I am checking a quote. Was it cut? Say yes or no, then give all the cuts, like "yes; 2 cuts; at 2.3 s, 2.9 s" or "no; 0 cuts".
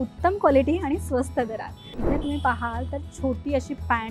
yes; 1 cut; at 2.0 s